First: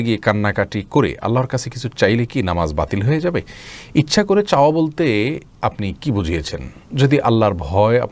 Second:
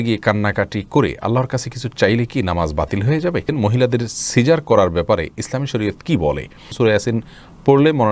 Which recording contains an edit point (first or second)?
second